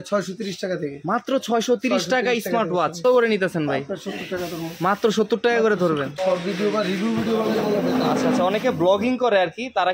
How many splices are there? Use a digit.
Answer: 2